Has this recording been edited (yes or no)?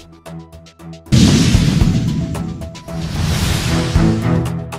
no